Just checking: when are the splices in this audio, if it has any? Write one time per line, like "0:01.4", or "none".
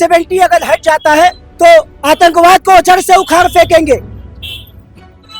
0:01.4